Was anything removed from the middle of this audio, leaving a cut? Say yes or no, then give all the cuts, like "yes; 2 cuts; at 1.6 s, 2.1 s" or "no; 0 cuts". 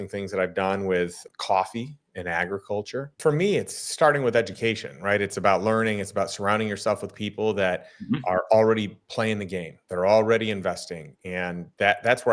yes; 2 cuts; at 1.2 s, 3.0 s